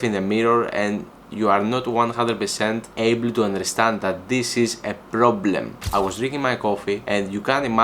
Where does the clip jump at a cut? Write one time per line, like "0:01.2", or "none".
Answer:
0:02.9
0:05.8
0:07.0